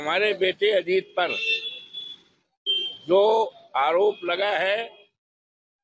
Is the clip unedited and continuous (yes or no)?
yes